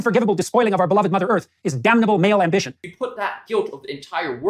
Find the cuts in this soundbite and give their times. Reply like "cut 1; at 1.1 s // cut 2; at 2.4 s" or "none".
cut 1; at 2.8 s